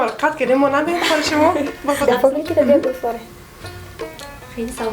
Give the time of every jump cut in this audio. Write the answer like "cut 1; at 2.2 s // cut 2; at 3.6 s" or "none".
cut 1; at 1.8 s